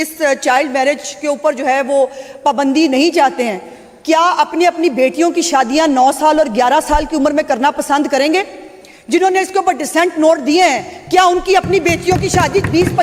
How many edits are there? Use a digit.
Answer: 0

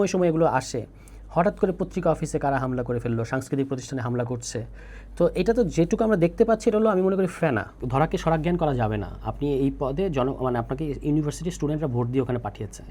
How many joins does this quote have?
1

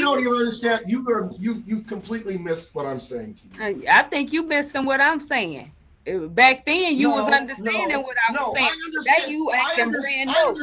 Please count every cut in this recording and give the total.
0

